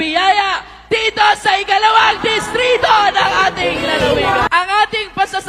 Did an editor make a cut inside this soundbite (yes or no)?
yes